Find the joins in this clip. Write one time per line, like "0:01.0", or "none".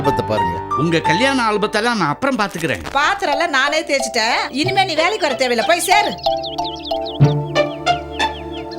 0:02.9